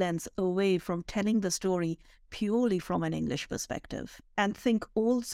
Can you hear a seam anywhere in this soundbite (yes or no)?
no